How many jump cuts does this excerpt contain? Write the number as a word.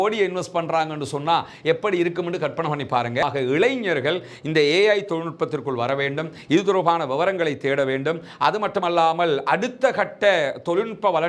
one